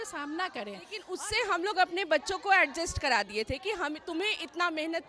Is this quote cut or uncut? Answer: cut